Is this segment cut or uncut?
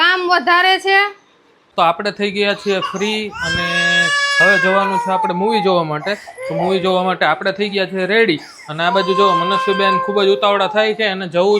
cut